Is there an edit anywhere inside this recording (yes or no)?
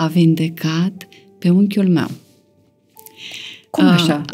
no